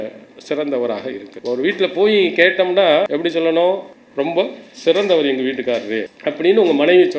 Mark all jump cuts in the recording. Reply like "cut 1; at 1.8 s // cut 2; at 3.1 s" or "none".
cut 1; at 1.3 s // cut 2; at 3.1 s // cut 3; at 4.0 s // cut 4; at 6.1 s